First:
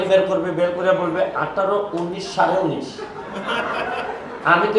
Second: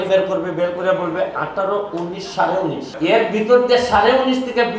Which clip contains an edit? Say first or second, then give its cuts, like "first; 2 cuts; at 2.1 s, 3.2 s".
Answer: second; 1 cut; at 2.9 s